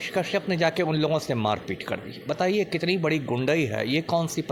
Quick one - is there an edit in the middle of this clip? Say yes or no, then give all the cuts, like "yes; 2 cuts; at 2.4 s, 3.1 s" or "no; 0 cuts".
no; 0 cuts